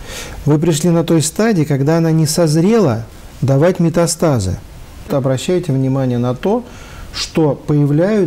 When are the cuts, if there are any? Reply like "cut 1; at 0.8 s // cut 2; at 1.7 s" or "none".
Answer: cut 1; at 5.1 s